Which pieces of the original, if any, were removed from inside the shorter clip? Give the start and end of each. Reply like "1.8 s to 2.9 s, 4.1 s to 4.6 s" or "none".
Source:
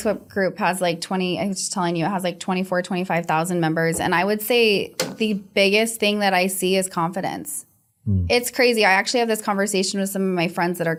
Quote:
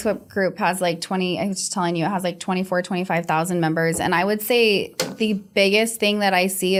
none